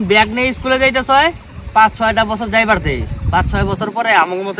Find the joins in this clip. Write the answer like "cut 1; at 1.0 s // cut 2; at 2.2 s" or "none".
none